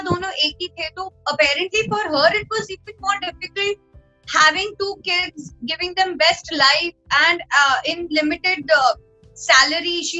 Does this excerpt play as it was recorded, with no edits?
yes; 0 cuts

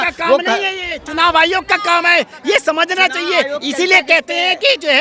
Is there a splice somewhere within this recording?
no; 0 cuts

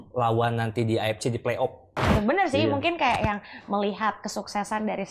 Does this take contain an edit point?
yes; 1 cut; at 2.1 s

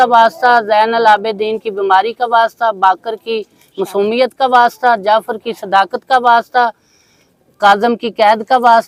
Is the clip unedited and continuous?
yes; 0 cuts

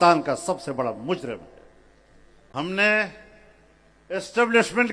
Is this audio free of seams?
no; 1 cut; at 2.6 s

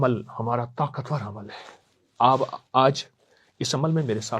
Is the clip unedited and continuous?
yes; 0 cuts

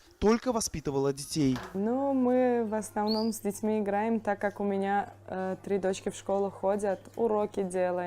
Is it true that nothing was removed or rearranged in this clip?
no; 1 cut; at 2.1 s

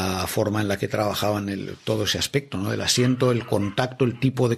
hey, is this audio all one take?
yes; 0 cuts

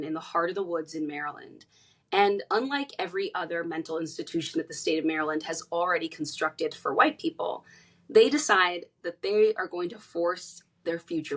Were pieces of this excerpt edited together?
no; 0 cuts

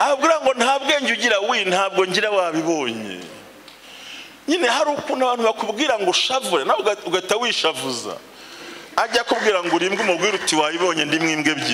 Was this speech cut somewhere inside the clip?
no; 0 cuts

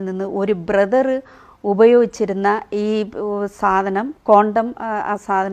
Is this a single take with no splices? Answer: yes; 0 cuts

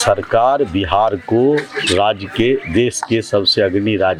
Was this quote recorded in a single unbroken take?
yes; 0 cuts

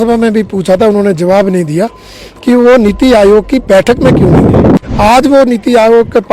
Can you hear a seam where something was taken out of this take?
yes; 1 cut; at 4.8 s

